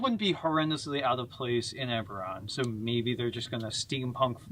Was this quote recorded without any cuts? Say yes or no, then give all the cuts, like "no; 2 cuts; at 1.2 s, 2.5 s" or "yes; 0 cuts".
no; 1 cut; at 3.5 s